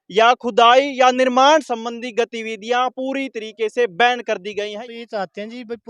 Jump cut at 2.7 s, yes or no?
no